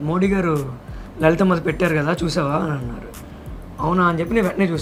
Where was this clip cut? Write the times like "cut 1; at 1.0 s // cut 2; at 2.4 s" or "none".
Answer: none